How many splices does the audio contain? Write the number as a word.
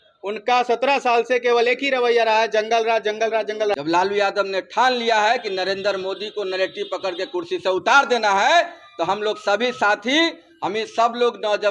one